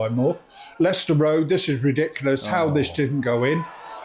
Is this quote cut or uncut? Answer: uncut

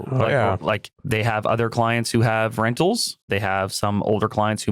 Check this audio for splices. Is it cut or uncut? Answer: cut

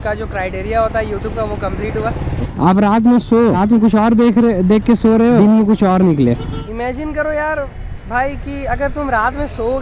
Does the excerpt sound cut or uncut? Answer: cut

